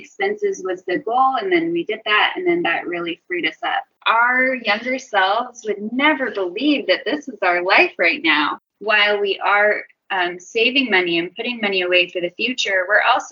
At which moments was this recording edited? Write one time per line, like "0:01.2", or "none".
0:03.9
0:08.6